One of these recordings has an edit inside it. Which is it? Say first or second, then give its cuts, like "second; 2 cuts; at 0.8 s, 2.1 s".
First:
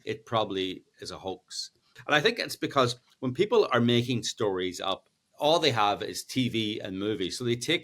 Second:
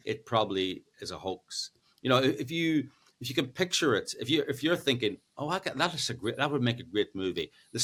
first; 2 cuts; at 2.0 s, 5.2 s